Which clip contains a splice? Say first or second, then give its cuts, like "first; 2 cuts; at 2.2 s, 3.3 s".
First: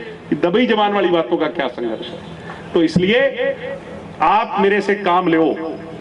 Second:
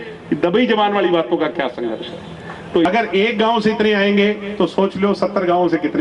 second; 1 cut; at 2.9 s